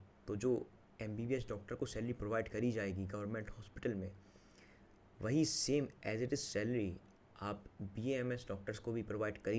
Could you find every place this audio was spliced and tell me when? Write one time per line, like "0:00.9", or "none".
none